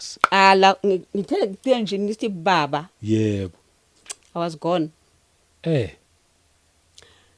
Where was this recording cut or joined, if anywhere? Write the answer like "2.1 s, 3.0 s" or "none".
none